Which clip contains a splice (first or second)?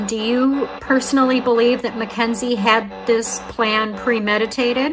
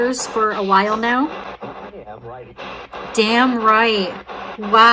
second